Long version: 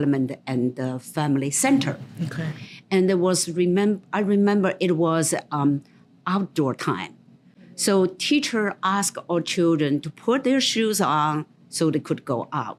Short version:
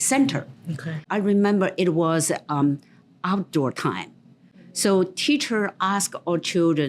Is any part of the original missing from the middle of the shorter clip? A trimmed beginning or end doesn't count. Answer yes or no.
yes